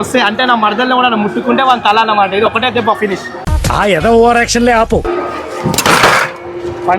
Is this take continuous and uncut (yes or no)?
no